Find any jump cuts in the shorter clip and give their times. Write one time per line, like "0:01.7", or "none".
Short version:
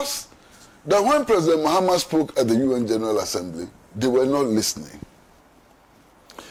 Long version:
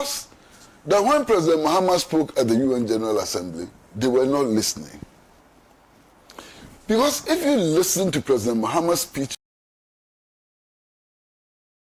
none